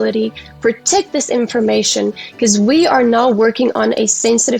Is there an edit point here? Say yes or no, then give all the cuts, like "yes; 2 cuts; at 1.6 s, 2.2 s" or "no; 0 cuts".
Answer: no; 0 cuts